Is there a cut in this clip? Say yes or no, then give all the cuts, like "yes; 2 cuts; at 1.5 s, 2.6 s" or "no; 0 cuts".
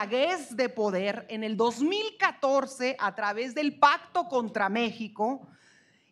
no; 0 cuts